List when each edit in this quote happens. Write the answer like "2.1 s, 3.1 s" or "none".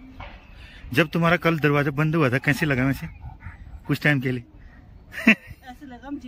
none